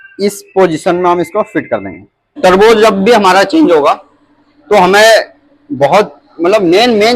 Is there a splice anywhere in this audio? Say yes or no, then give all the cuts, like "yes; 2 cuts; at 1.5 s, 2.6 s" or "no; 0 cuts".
yes; 1 cut; at 2.3 s